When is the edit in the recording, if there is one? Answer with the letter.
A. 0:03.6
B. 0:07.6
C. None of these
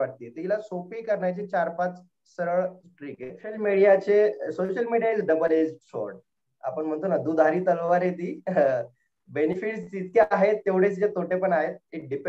A